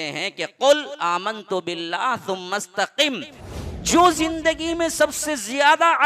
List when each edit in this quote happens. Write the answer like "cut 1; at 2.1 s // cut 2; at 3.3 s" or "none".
cut 1; at 3.3 s